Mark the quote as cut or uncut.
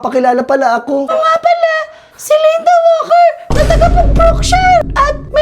cut